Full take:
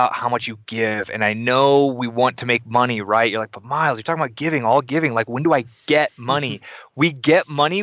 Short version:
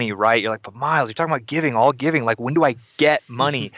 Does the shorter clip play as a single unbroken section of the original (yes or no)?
yes